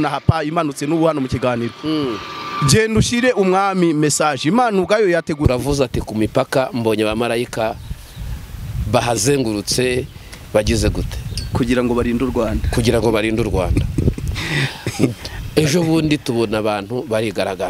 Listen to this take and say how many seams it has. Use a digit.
1